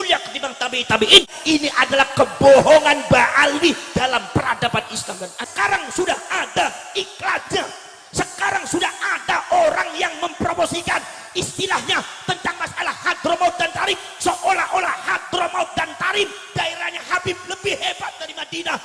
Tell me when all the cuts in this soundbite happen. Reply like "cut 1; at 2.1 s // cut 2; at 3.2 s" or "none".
cut 1; at 1.3 s // cut 2; at 5.5 s

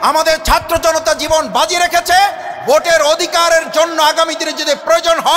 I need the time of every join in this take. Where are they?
none

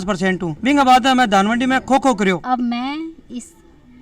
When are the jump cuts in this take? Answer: cut 1; at 2.4 s

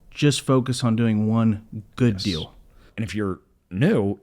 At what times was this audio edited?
cut 1; at 2.9 s

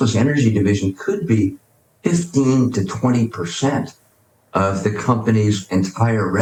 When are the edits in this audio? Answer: none

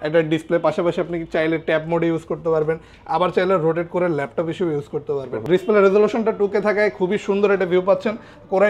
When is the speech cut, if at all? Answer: cut 1; at 5.3 s

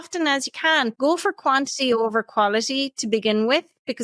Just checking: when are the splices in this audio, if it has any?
cut 1; at 0.9 s

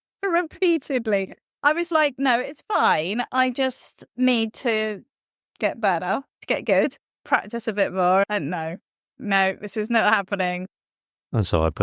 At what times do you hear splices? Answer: cut 1; at 6.4 s // cut 2; at 7.2 s // cut 3; at 9.1 s // cut 4; at 10.7 s

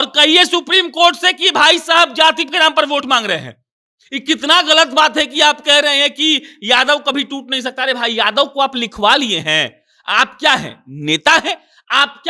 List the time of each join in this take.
none

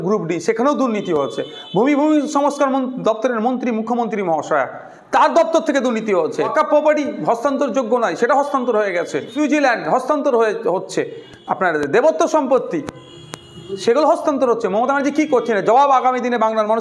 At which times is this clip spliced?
cut 1; at 6.5 s // cut 2; at 9.3 s

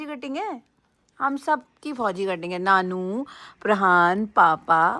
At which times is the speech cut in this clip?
none

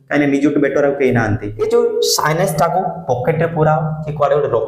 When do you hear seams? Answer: cut 1; at 1.5 s

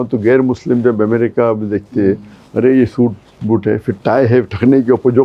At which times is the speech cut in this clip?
none

